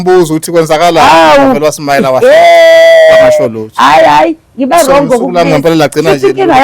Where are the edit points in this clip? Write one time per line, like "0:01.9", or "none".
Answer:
none